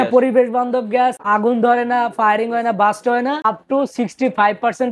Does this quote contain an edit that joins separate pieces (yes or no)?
yes